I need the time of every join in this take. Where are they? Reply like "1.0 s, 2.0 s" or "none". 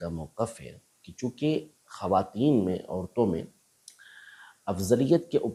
none